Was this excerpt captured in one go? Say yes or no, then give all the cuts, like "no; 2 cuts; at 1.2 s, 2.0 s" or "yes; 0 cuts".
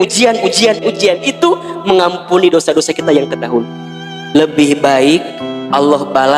no; 2 cuts; at 0.8 s, 4.4 s